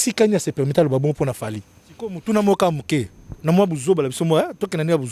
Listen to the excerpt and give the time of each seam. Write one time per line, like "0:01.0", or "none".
0:02.2